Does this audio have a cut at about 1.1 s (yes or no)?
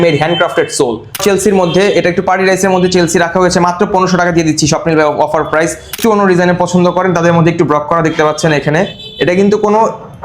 yes